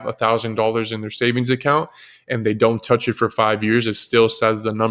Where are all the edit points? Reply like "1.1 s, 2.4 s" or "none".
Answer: none